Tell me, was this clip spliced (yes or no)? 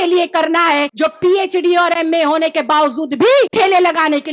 yes